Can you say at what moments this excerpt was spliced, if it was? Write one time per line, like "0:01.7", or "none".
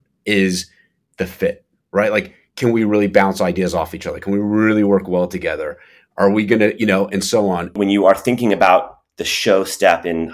0:07.8